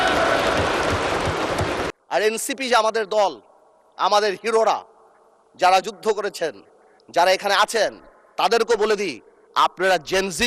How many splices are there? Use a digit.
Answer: 1